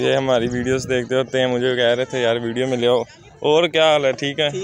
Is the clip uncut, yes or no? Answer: yes